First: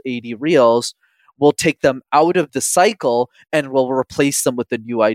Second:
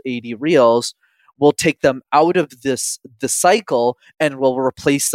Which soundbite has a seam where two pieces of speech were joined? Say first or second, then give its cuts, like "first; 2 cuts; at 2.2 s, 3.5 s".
first; 1 cut; at 2.5 s